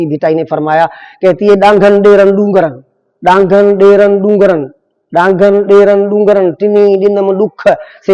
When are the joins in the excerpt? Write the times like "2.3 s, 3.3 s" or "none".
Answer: none